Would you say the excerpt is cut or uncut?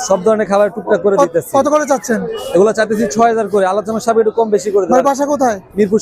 uncut